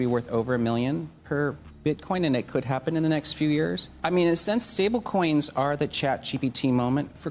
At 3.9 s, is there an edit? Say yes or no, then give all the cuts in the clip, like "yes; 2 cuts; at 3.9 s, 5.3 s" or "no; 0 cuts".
yes; 1 cut; at 3.9 s